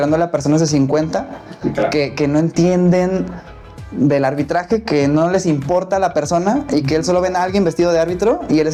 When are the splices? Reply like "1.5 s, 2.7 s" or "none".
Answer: none